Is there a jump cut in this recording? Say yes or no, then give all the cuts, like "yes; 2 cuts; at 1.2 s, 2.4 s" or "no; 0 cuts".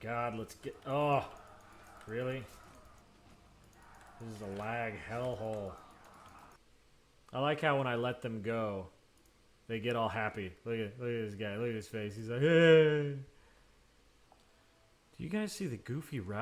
yes; 3 cuts; at 3.0 s, 6.6 s, 14.3 s